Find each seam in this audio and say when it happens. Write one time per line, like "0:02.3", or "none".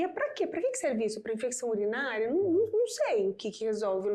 none

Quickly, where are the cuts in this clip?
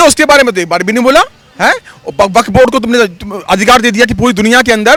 none

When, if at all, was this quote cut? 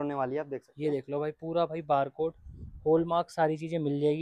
none

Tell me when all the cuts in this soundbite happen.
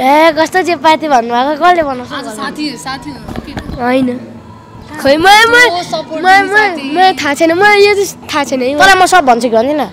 none

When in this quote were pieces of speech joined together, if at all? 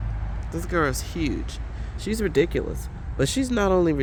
none

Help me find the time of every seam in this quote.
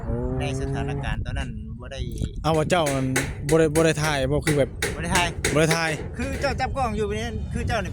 0:01.1

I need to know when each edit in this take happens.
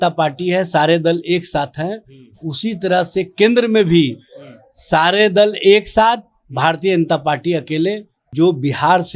0:08.3

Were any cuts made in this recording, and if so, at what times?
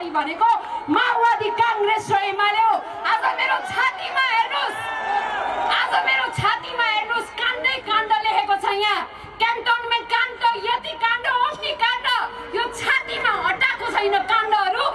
none

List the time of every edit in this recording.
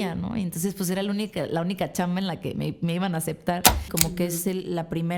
0:03.9

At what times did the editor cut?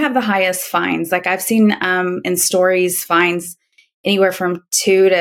none

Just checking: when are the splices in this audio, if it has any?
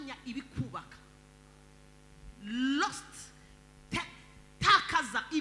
none

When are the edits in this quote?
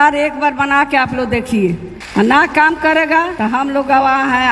0:01.9
0:03.3

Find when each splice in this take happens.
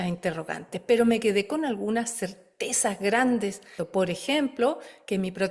0:03.8

